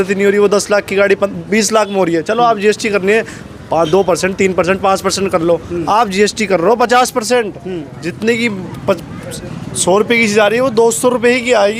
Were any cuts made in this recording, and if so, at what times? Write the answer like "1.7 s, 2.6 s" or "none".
none